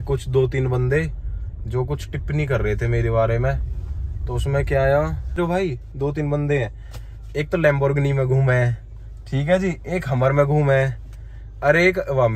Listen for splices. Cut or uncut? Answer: cut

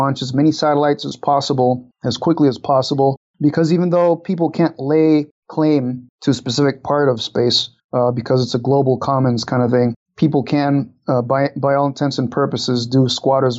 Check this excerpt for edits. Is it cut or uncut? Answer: uncut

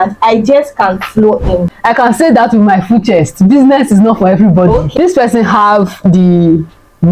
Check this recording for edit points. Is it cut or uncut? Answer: cut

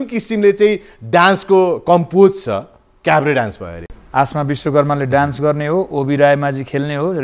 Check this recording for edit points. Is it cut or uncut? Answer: cut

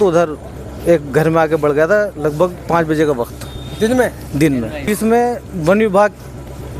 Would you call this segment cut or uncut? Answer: cut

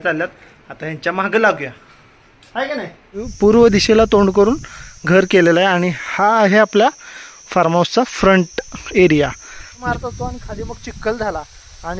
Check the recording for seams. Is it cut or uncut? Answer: cut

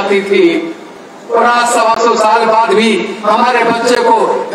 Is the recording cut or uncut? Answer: uncut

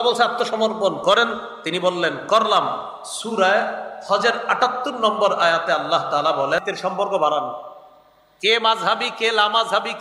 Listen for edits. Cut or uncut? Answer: cut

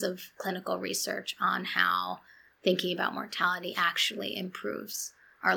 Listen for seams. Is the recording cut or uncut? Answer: uncut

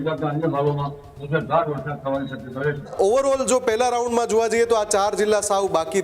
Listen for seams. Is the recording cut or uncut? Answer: cut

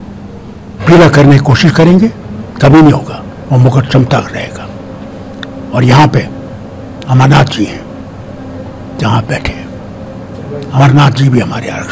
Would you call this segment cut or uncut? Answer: uncut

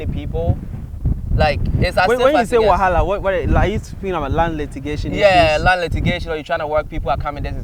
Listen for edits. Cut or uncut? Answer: uncut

